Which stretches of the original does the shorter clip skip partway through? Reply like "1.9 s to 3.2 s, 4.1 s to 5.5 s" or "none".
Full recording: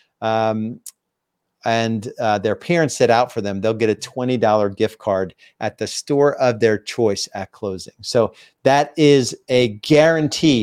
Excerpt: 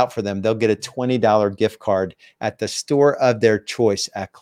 none